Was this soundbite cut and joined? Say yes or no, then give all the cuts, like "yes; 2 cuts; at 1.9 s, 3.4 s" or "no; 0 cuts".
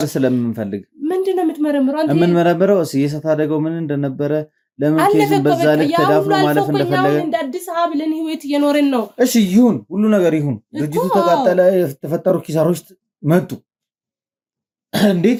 no; 0 cuts